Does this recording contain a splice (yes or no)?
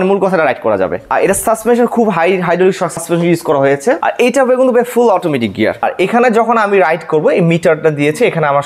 yes